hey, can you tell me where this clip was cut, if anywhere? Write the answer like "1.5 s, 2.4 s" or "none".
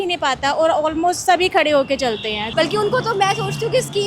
2.4 s